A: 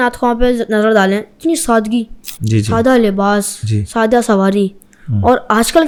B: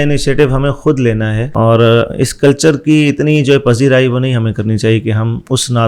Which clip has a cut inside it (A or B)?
B